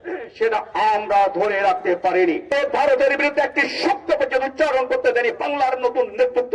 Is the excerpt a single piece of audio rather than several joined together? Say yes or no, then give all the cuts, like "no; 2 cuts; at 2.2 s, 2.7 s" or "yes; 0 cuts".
no; 1 cut; at 2.5 s